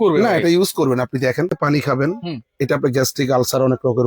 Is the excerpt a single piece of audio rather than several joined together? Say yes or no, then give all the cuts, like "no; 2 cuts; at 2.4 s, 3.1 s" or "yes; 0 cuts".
no; 1 cut; at 1.5 s